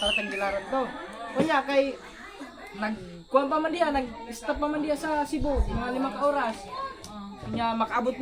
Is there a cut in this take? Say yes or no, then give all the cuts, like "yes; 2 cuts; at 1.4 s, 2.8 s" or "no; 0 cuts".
no; 0 cuts